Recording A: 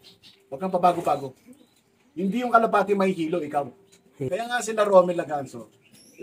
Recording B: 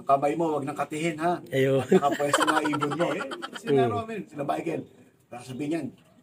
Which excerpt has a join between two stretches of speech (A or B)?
A